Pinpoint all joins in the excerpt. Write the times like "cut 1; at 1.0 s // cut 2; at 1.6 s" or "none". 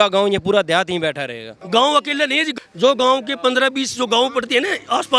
cut 1; at 1.5 s // cut 2; at 2.5 s